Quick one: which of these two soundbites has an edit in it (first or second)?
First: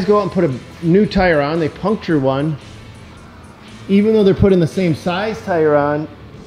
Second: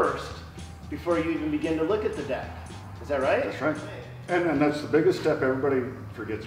second